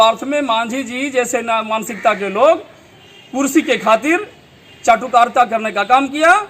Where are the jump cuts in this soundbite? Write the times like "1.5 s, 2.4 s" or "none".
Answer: none